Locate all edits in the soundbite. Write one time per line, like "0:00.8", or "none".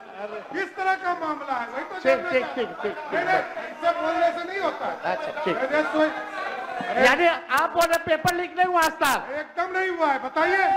none